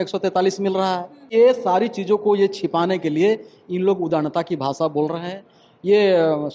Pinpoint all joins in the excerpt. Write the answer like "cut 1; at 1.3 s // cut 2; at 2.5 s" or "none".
cut 1; at 1.3 s